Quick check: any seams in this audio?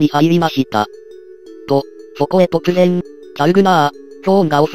no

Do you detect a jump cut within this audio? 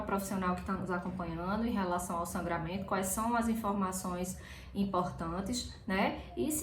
no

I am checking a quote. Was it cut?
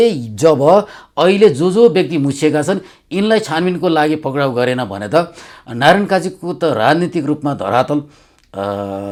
no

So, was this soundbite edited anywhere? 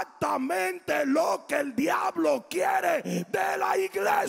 no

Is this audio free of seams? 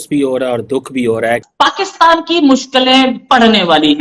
no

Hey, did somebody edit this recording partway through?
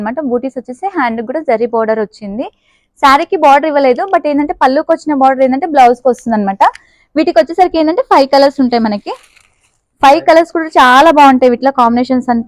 no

